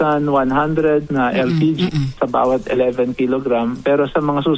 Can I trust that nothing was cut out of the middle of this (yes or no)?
no